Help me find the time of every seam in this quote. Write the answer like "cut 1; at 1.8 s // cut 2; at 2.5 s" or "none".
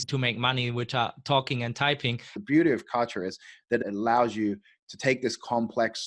cut 1; at 2.3 s // cut 2; at 3.8 s

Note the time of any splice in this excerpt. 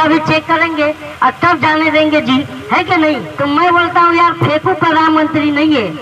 cut 1; at 3.3 s

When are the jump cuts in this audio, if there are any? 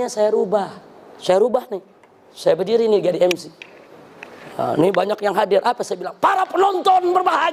none

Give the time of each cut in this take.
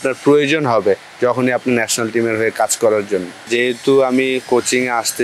cut 1; at 3.4 s

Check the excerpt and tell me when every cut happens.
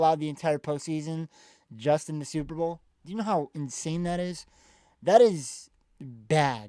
none

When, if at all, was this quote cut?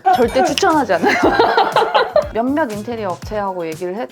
cut 1; at 2.3 s

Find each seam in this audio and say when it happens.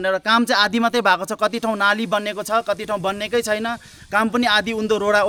none

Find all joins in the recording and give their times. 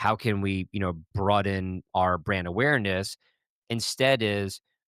cut 1; at 1.1 s // cut 2; at 1.9 s

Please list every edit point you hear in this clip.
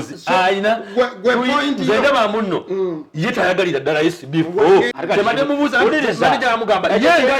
cut 1; at 5.0 s

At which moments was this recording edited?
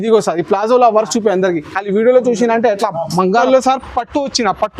cut 1; at 3.4 s

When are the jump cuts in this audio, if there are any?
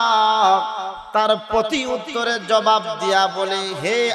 cut 1; at 0.9 s

